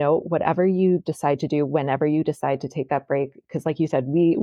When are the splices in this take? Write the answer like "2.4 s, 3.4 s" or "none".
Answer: none